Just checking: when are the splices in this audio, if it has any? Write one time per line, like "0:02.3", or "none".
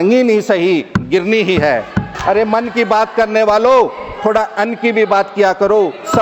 0:02.1